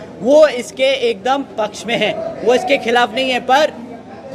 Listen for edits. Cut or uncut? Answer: uncut